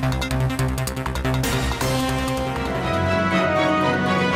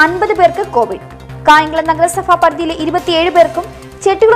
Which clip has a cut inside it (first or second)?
first